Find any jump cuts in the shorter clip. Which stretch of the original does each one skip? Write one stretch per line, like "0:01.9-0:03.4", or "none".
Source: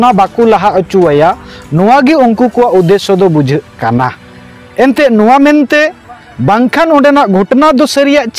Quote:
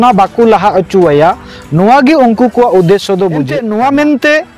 0:03.5-0:05.0